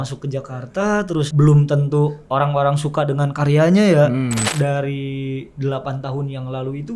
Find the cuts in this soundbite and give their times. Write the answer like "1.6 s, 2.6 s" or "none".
1.3 s, 4.5 s